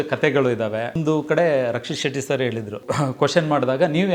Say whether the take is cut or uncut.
cut